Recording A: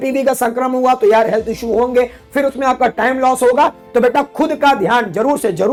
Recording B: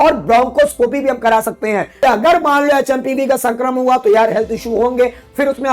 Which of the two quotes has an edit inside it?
B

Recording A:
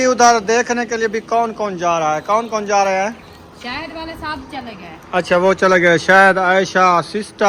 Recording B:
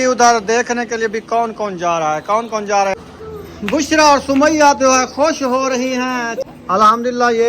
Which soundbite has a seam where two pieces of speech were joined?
B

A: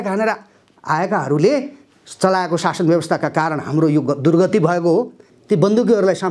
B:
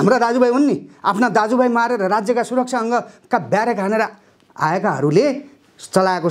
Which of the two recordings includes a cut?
A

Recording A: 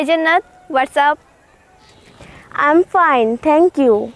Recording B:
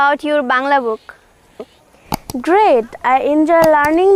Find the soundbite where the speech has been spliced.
A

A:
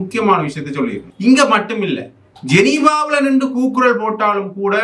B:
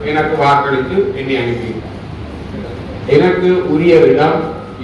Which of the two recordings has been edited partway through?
A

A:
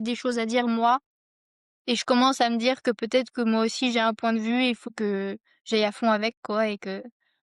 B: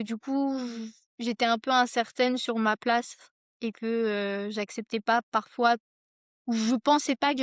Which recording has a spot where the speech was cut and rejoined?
A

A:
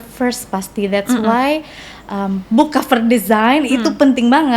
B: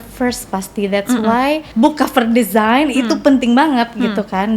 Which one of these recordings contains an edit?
B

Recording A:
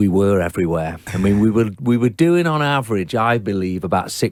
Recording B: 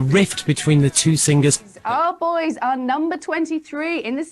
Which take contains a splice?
B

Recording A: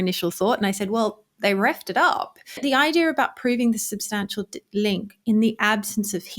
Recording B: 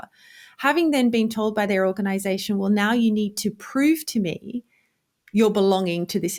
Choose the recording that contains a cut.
A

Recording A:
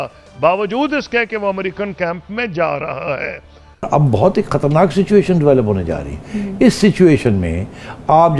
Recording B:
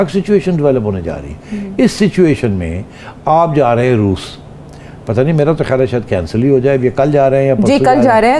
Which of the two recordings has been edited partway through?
A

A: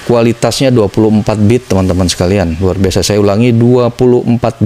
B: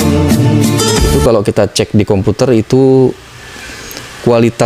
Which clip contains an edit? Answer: B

